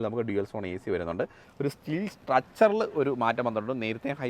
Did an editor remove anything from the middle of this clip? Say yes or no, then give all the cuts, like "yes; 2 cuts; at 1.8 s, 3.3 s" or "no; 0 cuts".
yes; 1 cut; at 1.5 s